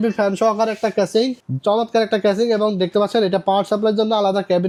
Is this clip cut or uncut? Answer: uncut